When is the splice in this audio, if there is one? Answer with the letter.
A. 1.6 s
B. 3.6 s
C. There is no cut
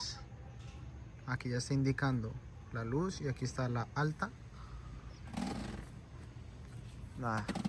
C